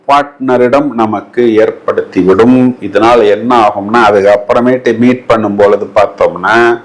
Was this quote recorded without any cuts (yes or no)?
yes